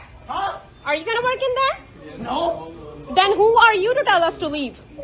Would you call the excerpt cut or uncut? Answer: uncut